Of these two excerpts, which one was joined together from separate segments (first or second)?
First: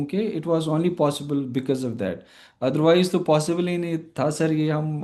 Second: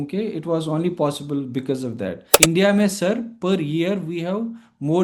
second